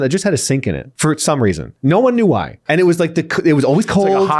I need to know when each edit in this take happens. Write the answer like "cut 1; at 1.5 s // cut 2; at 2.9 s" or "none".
cut 1; at 0.9 s // cut 2; at 2.5 s